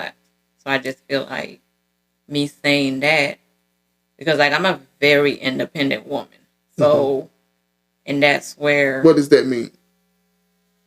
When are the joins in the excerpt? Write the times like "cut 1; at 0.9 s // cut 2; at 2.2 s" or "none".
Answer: cut 1; at 9.0 s